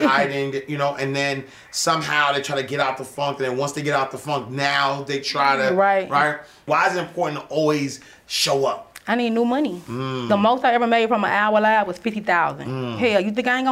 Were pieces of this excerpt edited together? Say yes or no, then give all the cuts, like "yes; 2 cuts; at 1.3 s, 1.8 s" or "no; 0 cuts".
yes; 1 cut; at 6.6 s